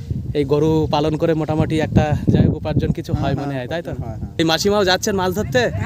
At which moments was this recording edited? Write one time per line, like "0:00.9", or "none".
0:04.4